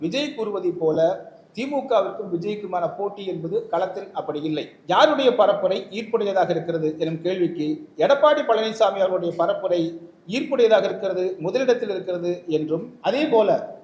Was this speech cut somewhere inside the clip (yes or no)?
yes